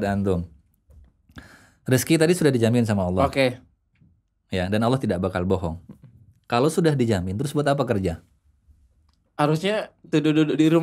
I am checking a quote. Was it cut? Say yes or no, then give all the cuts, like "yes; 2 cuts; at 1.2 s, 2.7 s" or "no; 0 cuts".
no; 0 cuts